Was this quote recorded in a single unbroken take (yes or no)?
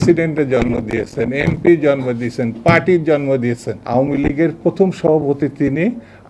no